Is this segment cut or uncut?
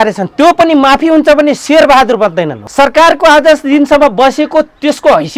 cut